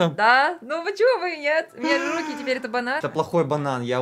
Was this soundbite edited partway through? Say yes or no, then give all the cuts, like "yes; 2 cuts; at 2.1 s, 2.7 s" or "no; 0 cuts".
yes; 1 cut; at 3.0 s